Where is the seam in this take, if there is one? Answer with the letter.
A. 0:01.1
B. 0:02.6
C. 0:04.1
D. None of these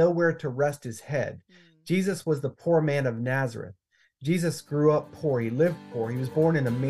D